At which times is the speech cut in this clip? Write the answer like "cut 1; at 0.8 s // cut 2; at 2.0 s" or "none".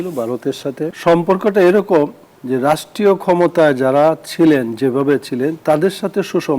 cut 1; at 1.0 s